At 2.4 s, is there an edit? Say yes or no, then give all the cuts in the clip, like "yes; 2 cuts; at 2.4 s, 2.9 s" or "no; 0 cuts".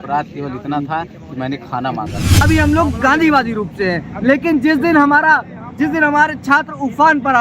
yes; 1 cut; at 2.4 s